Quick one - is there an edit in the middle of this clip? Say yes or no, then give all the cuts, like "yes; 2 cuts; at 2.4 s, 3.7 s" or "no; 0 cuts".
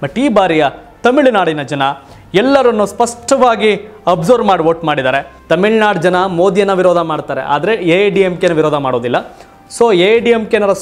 yes; 1 cut; at 5.3 s